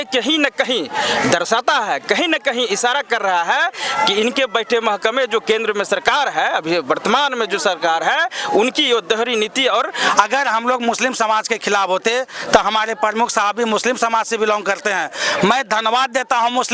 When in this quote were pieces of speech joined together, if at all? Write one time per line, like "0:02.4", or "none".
0:10.0